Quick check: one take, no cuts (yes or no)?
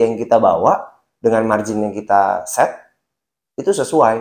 yes